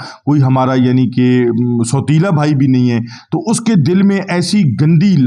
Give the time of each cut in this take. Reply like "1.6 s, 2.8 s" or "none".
none